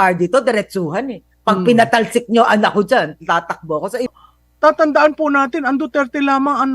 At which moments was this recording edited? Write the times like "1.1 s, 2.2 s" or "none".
4.1 s